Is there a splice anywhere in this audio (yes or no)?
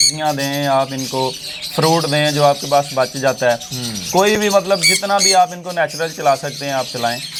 no